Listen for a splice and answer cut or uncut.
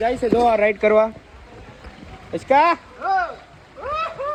uncut